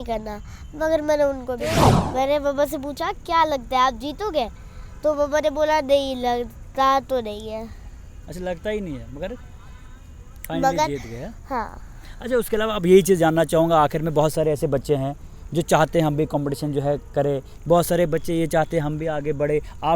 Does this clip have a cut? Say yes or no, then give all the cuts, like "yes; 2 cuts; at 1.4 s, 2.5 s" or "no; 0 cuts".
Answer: yes; 1 cut; at 2.0 s